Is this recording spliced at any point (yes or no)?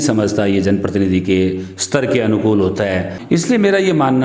yes